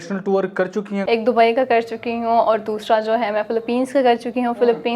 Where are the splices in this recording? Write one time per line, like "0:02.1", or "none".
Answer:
0:01.0